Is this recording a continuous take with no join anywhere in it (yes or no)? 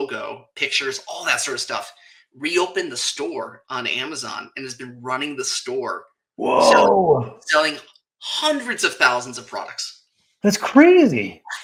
yes